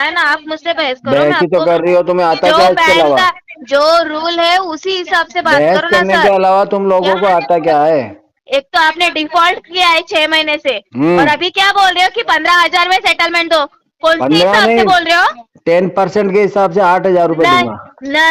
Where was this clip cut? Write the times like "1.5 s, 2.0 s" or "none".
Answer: 8.3 s